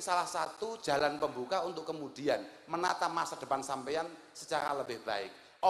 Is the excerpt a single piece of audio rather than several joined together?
yes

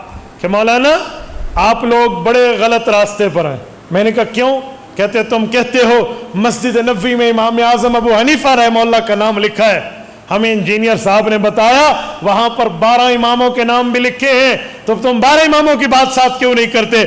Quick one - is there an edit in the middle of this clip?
no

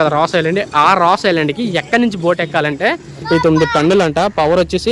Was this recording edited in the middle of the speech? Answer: yes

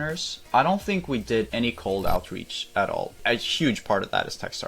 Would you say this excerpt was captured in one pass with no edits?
no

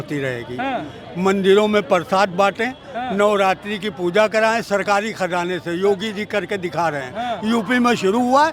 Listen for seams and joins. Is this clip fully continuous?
yes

